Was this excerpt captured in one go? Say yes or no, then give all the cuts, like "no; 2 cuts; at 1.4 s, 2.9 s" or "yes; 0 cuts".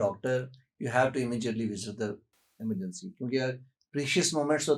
yes; 0 cuts